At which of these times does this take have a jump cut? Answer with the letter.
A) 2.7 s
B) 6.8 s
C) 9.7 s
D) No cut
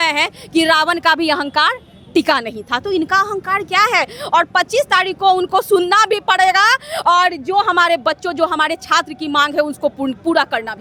D